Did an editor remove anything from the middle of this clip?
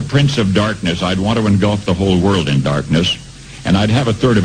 no; 0 cuts

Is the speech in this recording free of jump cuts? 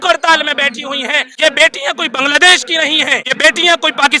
no; 2 cuts; at 1.3 s, 3.3 s

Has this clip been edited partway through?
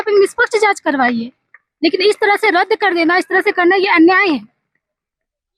no; 0 cuts

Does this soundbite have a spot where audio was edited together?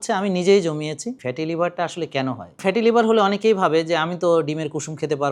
yes; 2 cuts; at 1.2 s, 2.6 s

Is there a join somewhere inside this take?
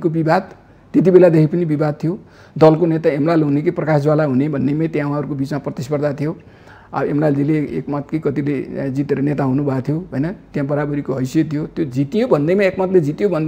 no; 0 cuts

